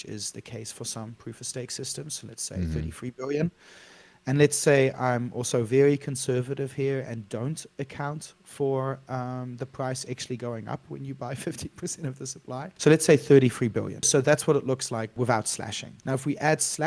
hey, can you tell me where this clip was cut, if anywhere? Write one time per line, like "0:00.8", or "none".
0:12.7
0:14.1
0:15.1
0:15.8